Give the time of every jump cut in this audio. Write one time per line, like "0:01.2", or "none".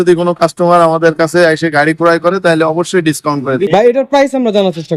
0:03.6